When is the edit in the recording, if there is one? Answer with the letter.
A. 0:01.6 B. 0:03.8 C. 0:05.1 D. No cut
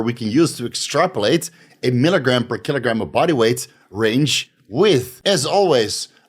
C